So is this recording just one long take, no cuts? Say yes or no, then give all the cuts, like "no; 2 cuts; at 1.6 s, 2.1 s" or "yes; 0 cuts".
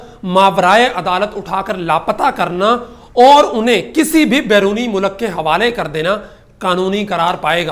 yes; 0 cuts